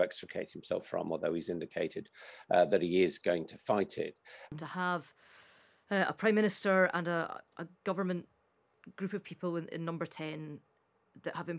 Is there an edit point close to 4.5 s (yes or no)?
yes